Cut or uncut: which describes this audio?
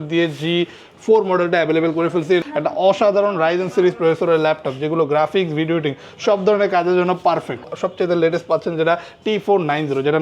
cut